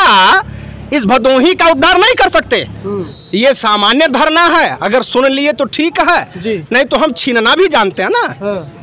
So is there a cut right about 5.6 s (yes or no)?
no